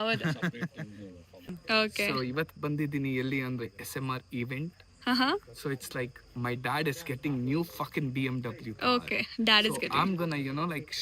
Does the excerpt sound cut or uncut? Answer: cut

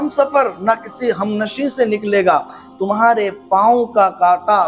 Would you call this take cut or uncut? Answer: cut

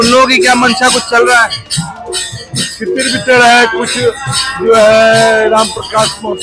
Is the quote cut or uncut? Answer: uncut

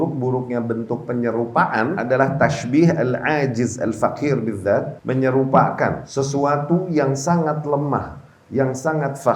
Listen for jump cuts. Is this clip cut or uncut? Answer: cut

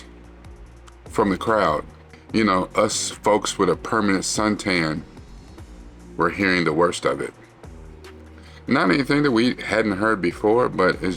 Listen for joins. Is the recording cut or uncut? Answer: uncut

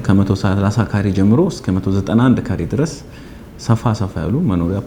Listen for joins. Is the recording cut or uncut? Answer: uncut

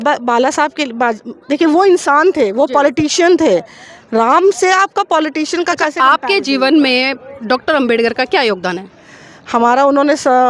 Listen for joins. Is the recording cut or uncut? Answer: uncut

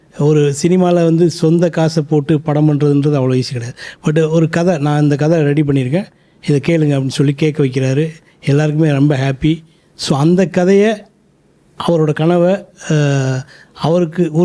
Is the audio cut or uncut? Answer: uncut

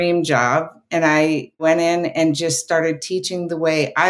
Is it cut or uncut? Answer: cut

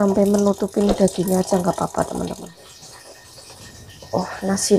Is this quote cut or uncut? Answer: cut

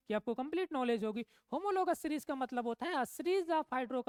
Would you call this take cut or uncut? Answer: uncut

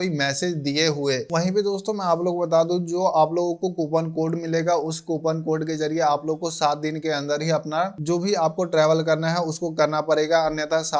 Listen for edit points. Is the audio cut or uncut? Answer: uncut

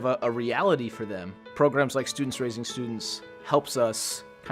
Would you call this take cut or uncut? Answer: uncut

